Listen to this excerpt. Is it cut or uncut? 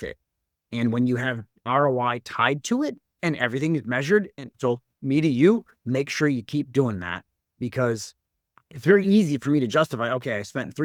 uncut